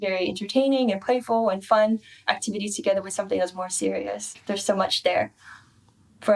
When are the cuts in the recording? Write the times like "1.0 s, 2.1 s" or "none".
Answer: 4.4 s